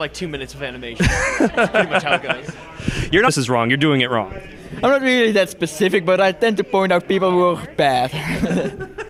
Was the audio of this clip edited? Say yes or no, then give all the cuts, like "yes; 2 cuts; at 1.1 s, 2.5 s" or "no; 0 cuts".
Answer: no; 0 cuts